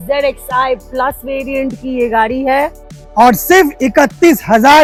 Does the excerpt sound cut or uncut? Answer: uncut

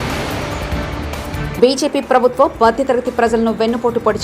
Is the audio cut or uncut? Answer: cut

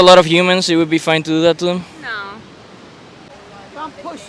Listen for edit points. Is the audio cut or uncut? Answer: cut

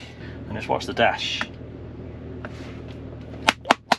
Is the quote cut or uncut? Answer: uncut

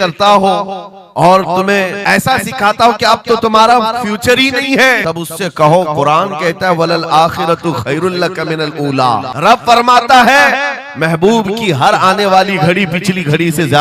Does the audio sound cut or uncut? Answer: cut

